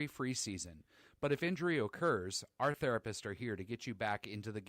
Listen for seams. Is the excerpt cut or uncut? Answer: cut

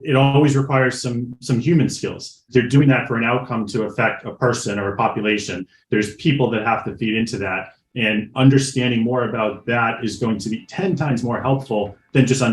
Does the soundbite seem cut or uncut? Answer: cut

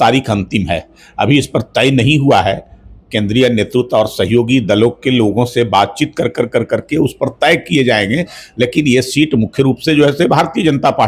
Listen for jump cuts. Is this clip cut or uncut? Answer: uncut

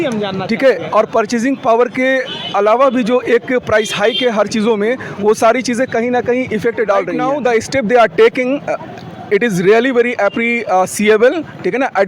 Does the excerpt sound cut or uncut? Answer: cut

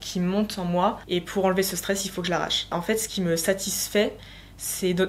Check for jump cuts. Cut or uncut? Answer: cut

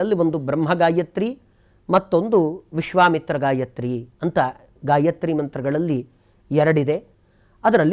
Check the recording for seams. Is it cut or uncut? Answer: uncut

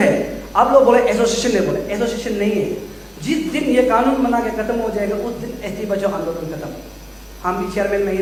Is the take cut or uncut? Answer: uncut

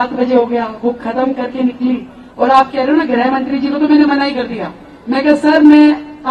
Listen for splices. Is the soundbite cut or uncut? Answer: uncut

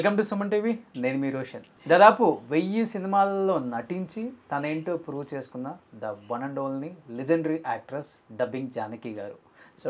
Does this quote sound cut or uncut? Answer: cut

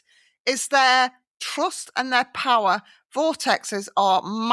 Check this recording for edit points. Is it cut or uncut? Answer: cut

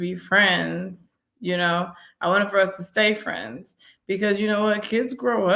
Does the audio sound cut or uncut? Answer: uncut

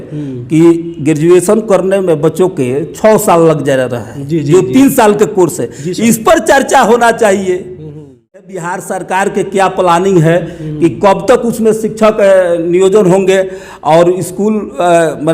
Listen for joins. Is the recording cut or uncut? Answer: cut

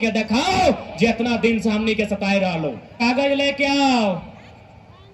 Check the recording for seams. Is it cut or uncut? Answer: cut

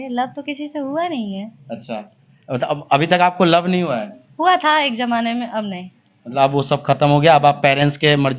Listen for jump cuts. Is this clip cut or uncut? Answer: uncut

